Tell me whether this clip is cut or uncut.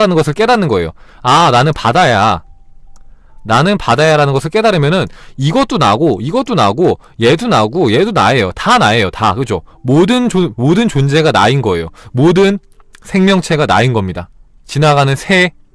uncut